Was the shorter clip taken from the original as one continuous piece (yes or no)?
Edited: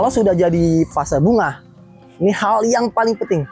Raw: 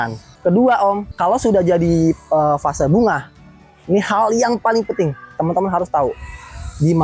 no